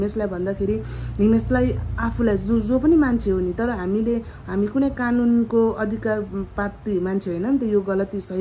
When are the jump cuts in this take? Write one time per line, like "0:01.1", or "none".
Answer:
none